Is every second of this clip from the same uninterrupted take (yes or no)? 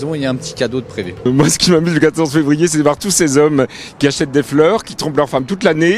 no